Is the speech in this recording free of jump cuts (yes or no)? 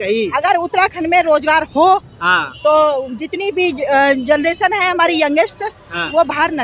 yes